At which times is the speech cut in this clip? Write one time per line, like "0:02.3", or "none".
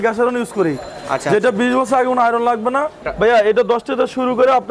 0:03.0